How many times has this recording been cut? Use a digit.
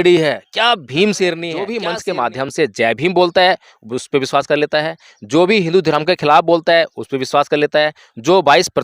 1